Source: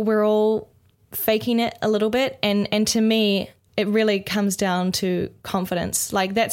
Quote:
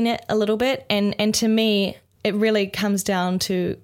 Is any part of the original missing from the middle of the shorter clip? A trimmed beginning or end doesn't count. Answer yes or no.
no